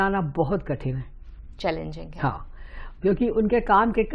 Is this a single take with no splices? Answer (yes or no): yes